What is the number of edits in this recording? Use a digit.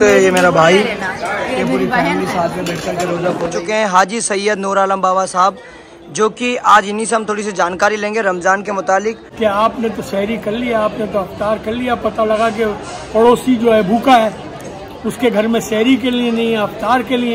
2